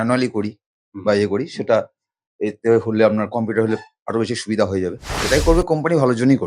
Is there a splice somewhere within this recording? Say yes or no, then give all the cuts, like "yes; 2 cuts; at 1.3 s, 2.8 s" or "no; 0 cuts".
yes; 1 cut; at 5.1 s